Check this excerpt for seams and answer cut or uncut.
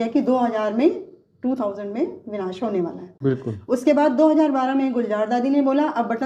cut